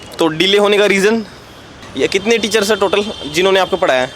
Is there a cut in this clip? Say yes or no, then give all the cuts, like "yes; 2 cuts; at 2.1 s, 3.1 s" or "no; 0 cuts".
yes; 1 cut; at 1.8 s